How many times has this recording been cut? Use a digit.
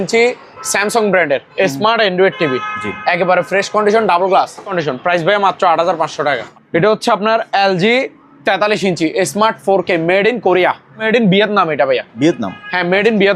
3